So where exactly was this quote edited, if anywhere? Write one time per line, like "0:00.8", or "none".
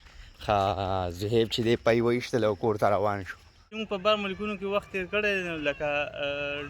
0:03.8